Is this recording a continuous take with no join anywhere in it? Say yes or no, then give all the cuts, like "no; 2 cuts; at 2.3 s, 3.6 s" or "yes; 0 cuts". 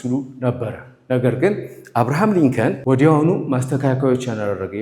no; 1 cut; at 2.8 s